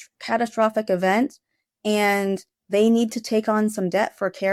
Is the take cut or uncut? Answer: uncut